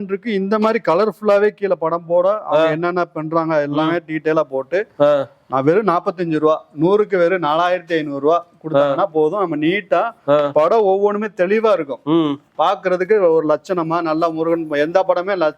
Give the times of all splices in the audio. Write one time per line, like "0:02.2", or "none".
none

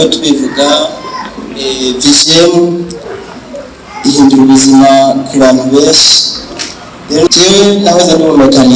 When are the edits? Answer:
0:07.3

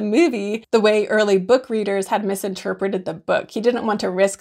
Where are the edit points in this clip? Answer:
none

